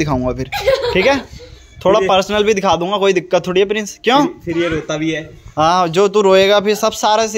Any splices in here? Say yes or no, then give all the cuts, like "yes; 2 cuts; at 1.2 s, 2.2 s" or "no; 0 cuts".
no; 0 cuts